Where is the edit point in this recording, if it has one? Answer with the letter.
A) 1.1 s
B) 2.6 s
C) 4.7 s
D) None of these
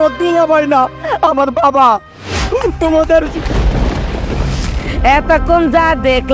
C